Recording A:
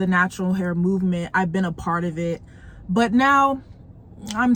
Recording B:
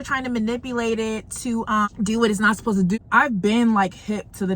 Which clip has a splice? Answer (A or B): B